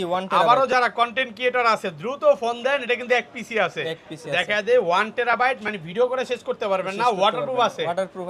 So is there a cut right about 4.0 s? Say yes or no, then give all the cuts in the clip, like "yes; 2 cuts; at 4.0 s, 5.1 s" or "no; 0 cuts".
no; 0 cuts